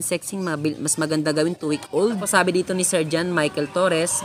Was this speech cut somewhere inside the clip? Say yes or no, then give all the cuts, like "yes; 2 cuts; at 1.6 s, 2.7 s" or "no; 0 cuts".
yes; 1 cut; at 2.0 s